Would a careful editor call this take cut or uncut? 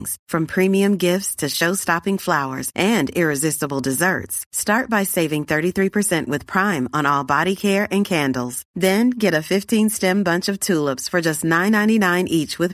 uncut